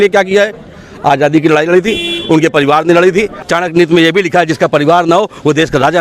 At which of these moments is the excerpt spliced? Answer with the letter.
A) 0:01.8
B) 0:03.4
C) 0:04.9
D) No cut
B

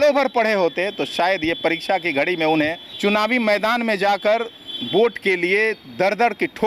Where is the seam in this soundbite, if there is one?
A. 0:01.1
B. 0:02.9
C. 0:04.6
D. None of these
B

